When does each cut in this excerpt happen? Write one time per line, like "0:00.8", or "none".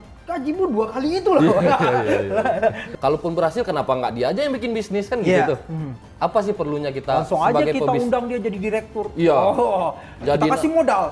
0:02.9